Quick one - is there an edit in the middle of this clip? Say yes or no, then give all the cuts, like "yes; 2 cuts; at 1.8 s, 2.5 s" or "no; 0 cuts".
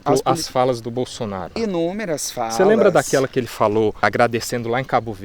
yes; 1 cut; at 1.5 s